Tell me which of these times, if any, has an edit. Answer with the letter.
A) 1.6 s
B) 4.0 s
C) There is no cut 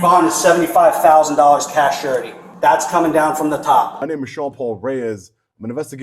B